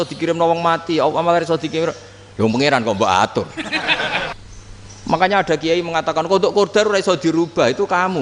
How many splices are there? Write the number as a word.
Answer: one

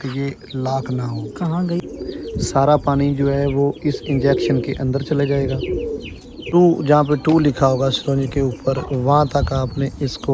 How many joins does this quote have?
two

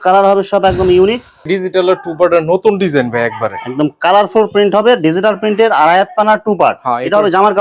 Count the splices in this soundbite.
one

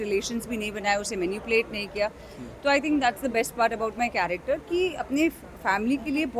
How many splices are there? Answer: zero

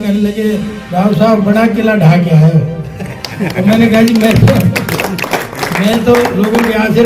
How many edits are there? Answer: zero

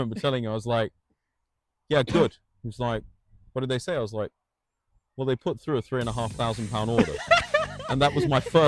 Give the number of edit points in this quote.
zero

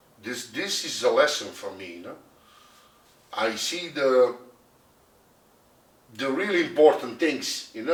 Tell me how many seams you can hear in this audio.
zero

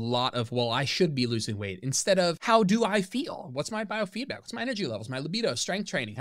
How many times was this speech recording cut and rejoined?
one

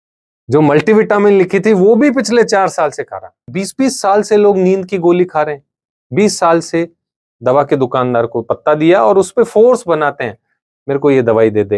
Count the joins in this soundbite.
one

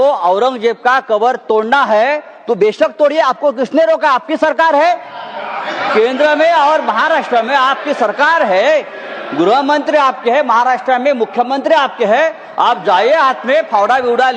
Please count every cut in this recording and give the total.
zero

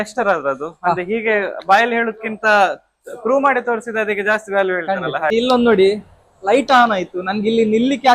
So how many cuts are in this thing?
one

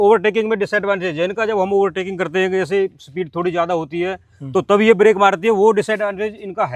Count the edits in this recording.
zero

